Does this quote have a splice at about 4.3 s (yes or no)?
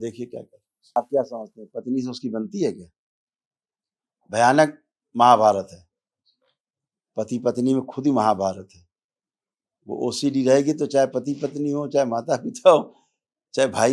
no